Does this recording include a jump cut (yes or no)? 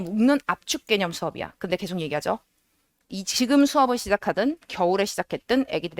no